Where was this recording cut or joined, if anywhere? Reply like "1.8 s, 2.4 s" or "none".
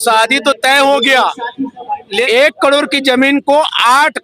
2.3 s